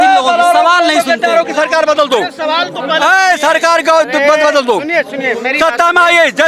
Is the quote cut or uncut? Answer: uncut